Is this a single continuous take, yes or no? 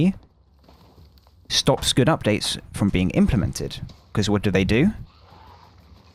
yes